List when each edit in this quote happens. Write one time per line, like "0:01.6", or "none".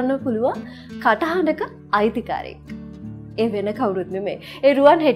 none